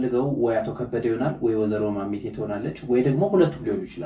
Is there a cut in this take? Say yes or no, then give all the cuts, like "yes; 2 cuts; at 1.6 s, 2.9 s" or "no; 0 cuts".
no; 0 cuts